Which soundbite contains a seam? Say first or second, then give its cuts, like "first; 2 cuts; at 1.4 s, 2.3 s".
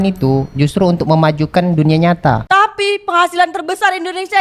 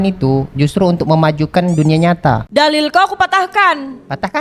first; 1 cut; at 2.4 s